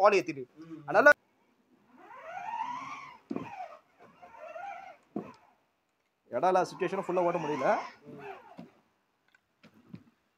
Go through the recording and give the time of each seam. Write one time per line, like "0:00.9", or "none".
0:01.1